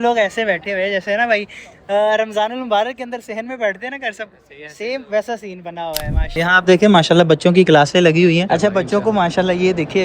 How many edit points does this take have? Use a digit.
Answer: 1